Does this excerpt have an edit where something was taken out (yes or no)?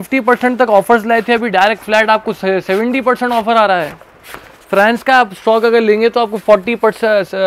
no